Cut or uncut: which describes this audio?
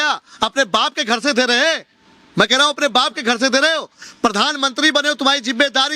uncut